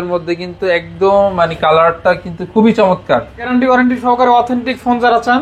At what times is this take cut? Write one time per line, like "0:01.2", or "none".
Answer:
0:03.5